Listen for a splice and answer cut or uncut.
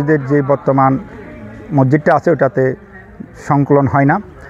uncut